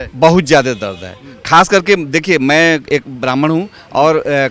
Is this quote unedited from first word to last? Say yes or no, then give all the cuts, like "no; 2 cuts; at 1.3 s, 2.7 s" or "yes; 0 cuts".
yes; 0 cuts